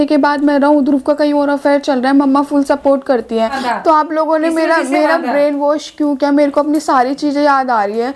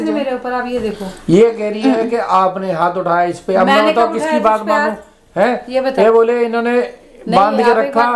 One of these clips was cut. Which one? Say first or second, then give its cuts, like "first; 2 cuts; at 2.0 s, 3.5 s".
first; 1 cut; at 3.6 s